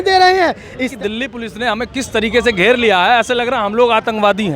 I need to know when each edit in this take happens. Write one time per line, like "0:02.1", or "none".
0:00.9